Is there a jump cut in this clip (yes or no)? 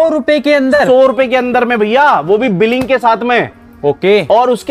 no